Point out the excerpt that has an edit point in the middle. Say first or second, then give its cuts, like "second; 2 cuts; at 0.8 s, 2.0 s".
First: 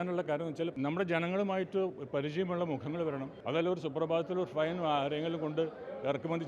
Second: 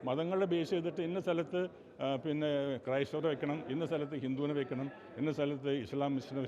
first; 2 cuts; at 0.7 s, 3.3 s